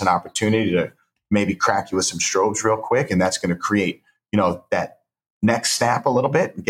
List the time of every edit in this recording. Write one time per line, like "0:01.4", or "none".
none